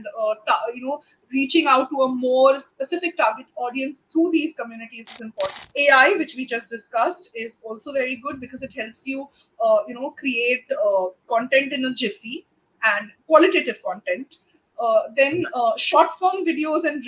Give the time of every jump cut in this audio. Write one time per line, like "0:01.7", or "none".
0:05.6